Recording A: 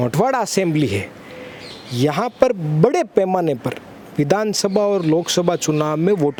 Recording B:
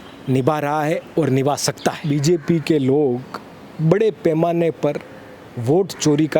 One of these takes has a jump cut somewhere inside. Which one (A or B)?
B